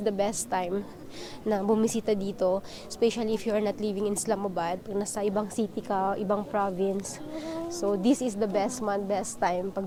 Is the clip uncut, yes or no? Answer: yes